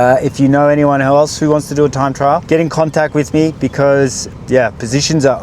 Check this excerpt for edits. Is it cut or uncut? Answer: cut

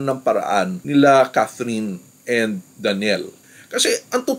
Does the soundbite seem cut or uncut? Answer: cut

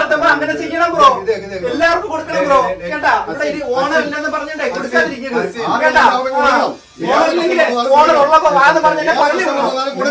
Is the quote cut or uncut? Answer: uncut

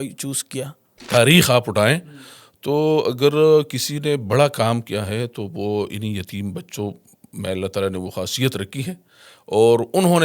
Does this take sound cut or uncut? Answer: cut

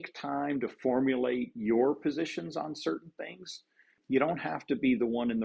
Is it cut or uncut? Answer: cut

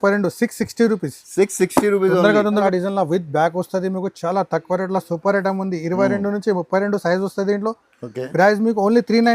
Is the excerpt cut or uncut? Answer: cut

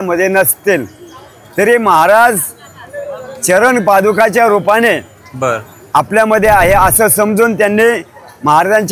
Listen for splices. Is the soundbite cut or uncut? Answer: uncut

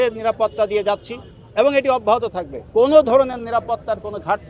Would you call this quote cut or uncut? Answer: cut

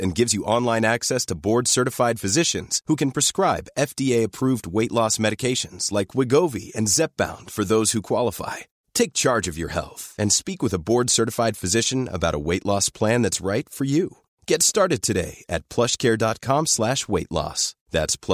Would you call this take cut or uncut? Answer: uncut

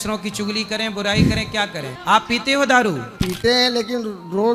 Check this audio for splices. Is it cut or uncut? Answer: cut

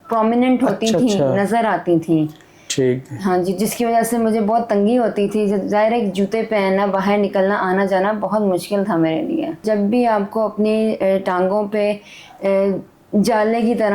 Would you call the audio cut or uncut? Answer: cut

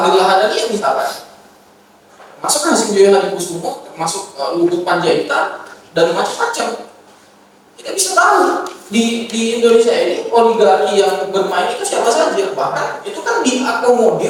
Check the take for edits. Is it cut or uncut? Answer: uncut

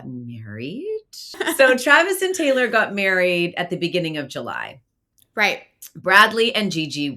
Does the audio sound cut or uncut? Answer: cut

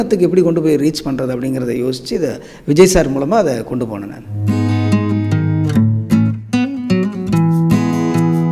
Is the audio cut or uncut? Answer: uncut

